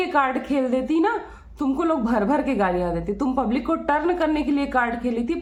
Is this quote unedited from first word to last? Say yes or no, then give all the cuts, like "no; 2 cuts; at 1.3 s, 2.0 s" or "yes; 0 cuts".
yes; 0 cuts